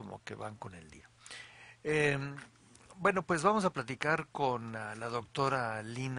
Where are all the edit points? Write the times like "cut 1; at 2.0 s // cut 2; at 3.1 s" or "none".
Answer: cut 1; at 3.3 s